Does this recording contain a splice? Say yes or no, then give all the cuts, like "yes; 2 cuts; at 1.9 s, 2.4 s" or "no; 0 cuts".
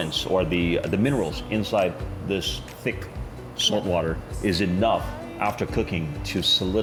no; 0 cuts